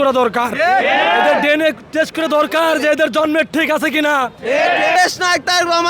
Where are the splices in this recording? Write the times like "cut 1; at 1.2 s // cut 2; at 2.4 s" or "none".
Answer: cut 1; at 5.0 s

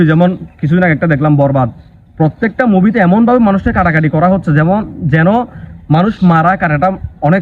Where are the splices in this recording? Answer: none

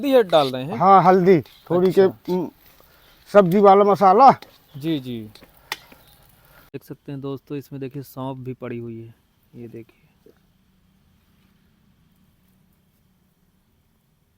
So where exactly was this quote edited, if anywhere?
cut 1; at 6.0 s

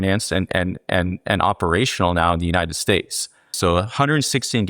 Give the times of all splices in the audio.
cut 1; at 3.5 s

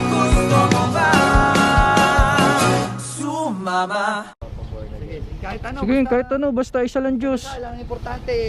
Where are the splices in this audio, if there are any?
cut 1; at 4.4 s

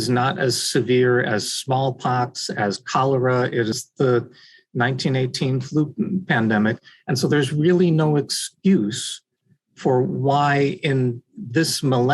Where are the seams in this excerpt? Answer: cut 1; at 3.8 s

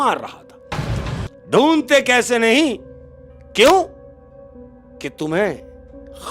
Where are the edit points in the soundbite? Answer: cut 1; at 1.3 s

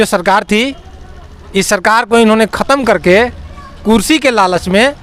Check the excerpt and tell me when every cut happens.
none

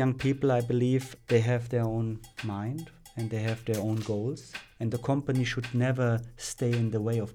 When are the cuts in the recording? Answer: cut 1; at 1.1 s // cut 2; at 2.3 s // cut 3; at 3.2 s // cut 4; at 4.9 s

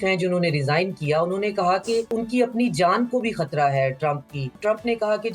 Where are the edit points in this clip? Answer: cut 1; at 2.1 s // cut 2; at 4.6 s

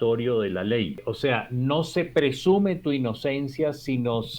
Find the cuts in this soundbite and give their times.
cut 1; at 1.1 s

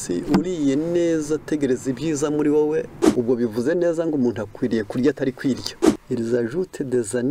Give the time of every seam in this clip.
cut 1; at 3.0 s // cut 2; at 5.9 s

